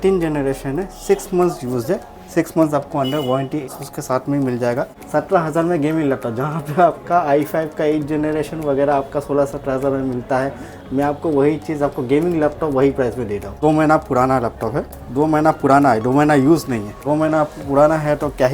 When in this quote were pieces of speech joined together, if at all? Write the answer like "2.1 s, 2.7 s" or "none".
3.7 s, 5.0 s, 13.6 s, 14.9 s, 17.0 s